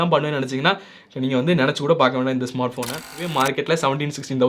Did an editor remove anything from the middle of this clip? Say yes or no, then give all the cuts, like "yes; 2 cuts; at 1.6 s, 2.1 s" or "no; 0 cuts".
yes; 1 cut; at 3.0 s